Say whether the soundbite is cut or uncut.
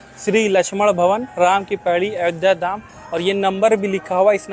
uncut